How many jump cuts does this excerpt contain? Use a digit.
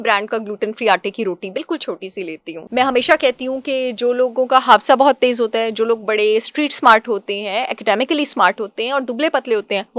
1